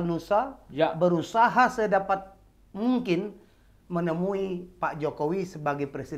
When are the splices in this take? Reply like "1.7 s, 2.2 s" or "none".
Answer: none